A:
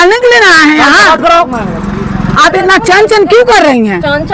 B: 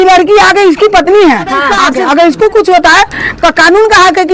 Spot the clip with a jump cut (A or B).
B